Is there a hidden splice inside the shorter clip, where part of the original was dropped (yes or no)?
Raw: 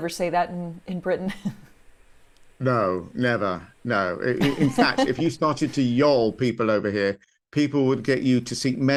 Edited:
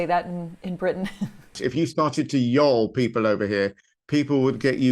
yes